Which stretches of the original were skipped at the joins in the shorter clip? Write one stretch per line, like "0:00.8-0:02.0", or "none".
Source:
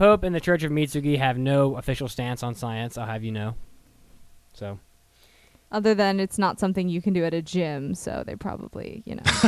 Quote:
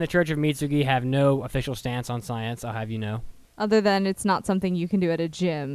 0:03.7-0:05.5